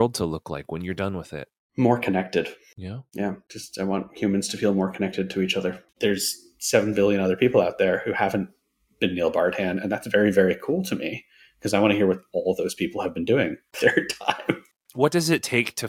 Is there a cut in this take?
yes; 2 cuts; at 5.8 s, 14.7 s

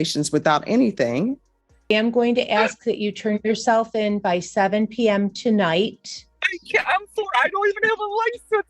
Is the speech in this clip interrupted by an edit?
yes; 1 cut; at 1.9 s

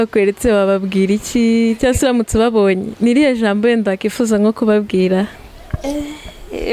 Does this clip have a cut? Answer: no; 0 cuts

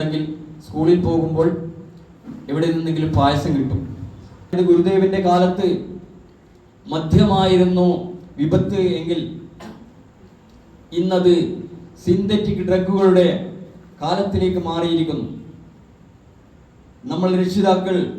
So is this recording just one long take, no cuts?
no; 1 cut; at 4.5 s

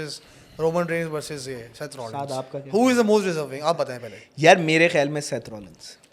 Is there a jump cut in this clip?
no; 0 cuts

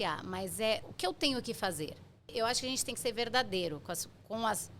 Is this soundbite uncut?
no; 2 cuts; at 0.9 s, 2.3 s

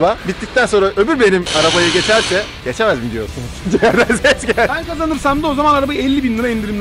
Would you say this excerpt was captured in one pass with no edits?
no; 1 cut; at 4.7 s

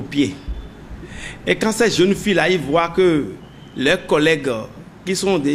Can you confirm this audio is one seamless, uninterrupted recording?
yes; 0 cuts

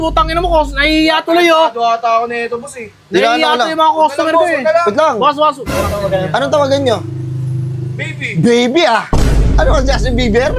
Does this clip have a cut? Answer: no; 0 cuts

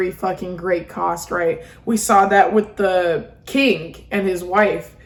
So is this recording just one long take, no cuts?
yes; 0 cuts

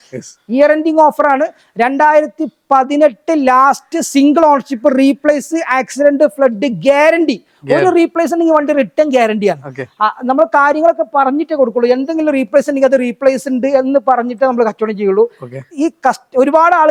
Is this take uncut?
yes; 0 cuts

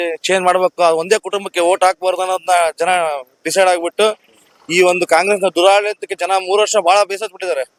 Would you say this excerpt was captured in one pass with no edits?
yes; 0 cuts

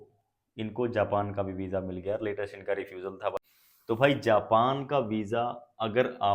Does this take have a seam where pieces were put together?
yes; 1 cut; at 3.3 s

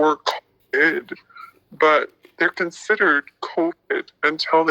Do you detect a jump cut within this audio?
yes; 2 cuts; at 2.2 s, 3.4 s

